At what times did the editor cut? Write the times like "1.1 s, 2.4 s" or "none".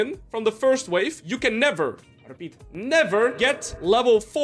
1.2 s, 3.3 s